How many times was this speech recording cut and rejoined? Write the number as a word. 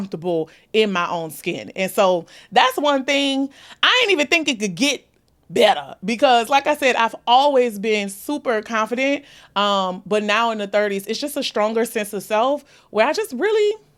zero